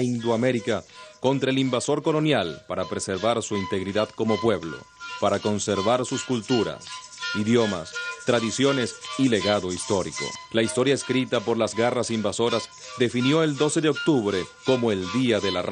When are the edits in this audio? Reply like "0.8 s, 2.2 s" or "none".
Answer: 1.4 s